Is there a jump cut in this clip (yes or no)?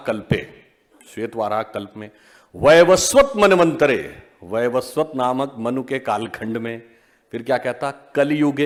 no